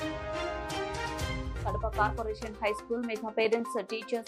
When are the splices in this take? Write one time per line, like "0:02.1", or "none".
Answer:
none